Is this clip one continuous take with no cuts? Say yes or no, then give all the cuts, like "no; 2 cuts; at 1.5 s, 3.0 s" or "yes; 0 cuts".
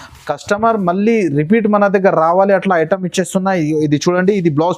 yes; 0 cuts